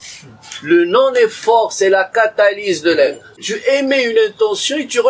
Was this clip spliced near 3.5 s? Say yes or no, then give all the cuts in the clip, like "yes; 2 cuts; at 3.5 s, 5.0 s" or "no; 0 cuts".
yes; 1 cut; at 3.5 s